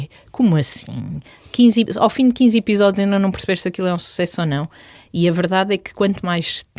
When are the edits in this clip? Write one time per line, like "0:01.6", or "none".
none